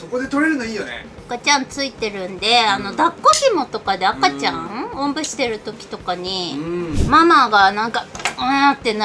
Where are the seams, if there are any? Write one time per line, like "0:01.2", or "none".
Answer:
0:07.0